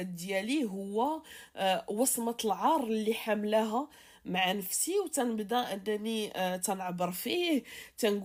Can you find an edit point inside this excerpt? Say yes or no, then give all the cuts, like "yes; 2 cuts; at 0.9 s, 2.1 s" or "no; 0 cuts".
no; 0 cuts